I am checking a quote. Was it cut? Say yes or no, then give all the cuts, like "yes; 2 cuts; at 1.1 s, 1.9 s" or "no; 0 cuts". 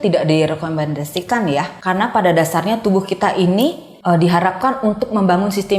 yes; 2 cuts; at 1.7 s, 3.9 s